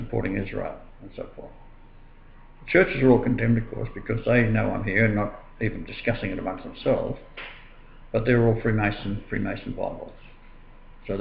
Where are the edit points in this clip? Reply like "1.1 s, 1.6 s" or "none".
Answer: none